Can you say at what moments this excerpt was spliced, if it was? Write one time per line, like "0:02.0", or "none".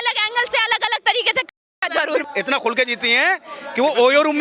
0:02.3